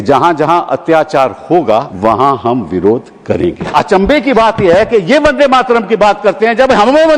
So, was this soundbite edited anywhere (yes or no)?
yes